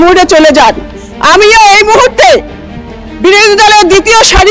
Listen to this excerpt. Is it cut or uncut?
uncut